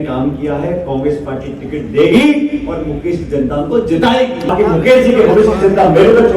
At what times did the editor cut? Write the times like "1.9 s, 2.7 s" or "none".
4.5 s